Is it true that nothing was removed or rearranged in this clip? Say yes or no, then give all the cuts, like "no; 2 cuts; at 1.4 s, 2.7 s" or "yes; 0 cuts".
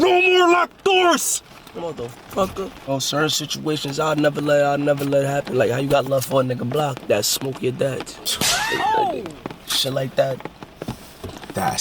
no; 1 cut; at 2.9 s